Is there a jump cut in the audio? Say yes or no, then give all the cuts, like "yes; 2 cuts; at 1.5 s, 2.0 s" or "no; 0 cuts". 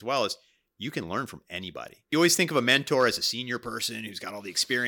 yes; 1 cut; at 2.1 s